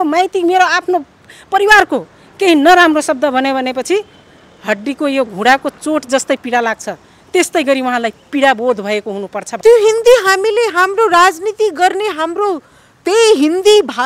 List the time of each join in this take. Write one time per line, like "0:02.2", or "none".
0:09.4